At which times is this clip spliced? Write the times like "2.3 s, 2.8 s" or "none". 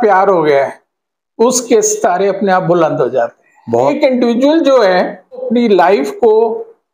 3.9 s, 5.5 s